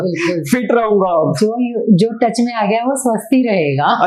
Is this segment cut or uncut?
uncut